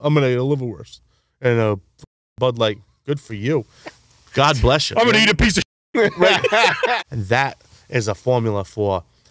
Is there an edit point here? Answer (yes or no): yes